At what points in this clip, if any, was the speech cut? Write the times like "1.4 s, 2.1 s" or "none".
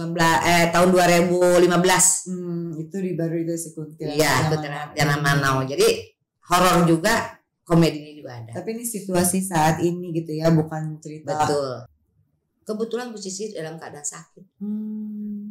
11.9 s